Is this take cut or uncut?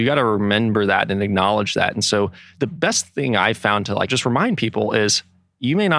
cut